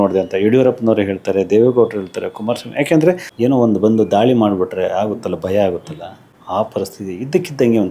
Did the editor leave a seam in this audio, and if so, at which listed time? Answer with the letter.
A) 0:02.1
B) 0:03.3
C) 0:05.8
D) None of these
B